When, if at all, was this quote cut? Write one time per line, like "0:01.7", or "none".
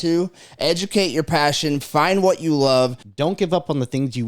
0:03.0